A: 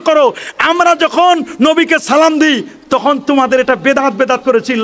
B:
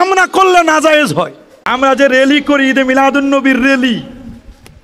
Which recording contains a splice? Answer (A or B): B